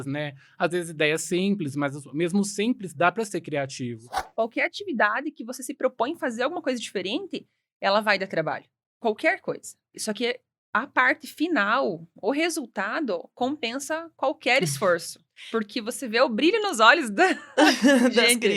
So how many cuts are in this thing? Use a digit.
1